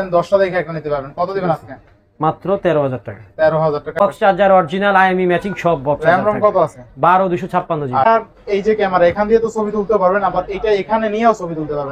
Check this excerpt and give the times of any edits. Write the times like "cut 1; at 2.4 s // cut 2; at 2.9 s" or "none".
cut 1; at 4.0 s // cut 2; at 8.1 s